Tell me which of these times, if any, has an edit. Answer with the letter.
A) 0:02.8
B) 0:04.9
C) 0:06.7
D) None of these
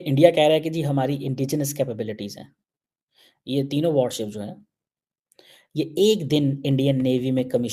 D